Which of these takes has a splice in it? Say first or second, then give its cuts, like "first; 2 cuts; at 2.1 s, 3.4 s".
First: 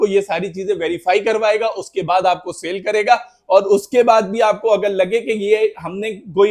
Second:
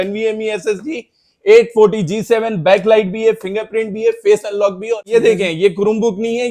second; 1 cut; at 5.1 s